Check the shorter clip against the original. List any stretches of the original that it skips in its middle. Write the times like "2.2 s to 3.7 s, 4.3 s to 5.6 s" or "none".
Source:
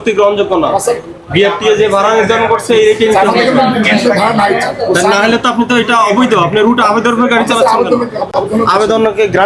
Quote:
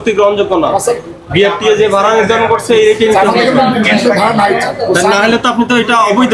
none